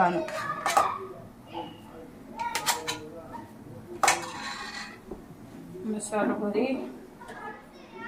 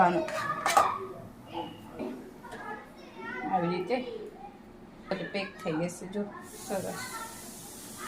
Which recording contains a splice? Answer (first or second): second